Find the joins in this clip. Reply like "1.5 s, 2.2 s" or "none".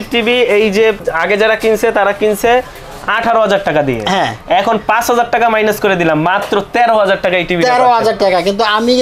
1.1 s